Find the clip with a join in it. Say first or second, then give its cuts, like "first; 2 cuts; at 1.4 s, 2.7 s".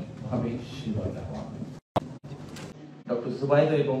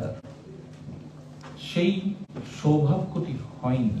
first; 1 cut; at 2.7 s